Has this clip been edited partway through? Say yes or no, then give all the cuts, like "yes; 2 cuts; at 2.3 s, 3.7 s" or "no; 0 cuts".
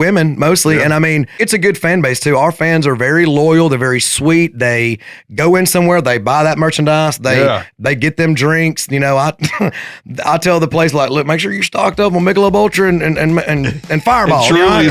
yes; 1 cut; at 1.4 s